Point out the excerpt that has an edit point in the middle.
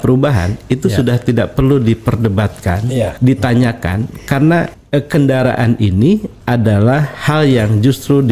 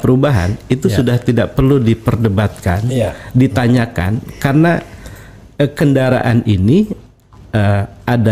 first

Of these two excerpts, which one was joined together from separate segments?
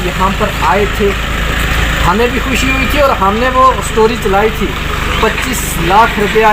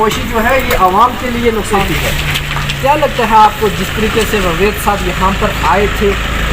second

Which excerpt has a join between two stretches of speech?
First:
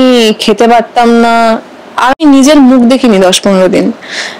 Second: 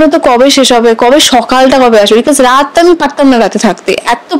first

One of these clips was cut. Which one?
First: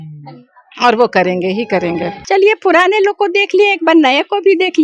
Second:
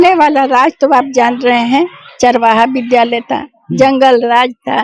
first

